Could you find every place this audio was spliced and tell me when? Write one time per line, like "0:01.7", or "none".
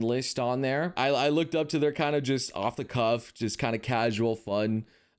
0:00.9

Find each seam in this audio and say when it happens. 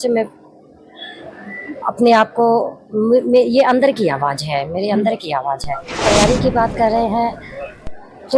0:05.9

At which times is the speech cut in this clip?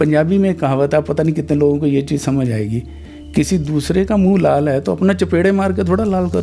none

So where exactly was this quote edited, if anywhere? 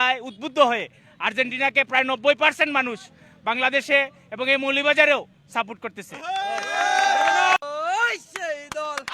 0:07.7

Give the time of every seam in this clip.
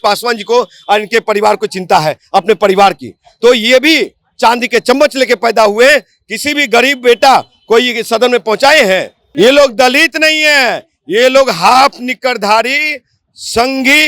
0:09.2

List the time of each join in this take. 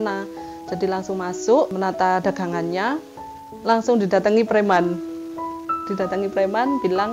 0:01.7
0:03.3

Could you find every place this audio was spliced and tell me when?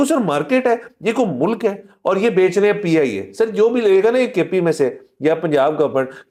none

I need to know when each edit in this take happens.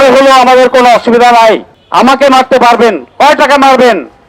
0:01.8

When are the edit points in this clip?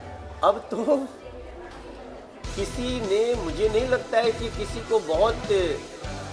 none

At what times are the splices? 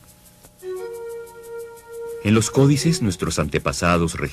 0:02.9

